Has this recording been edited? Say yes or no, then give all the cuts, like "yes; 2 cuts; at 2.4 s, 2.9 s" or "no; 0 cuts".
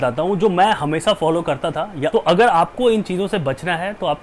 yes; 1 cut; at 2.1 s